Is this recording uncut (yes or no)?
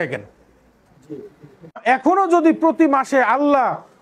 no